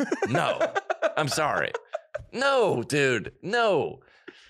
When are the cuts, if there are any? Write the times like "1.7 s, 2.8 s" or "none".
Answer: none